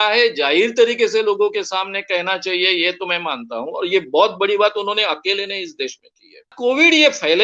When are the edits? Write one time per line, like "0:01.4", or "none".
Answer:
0:06.5